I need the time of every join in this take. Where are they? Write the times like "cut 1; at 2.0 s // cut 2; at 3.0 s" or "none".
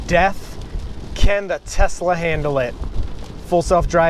none